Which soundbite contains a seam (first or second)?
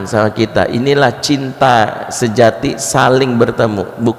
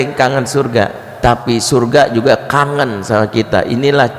second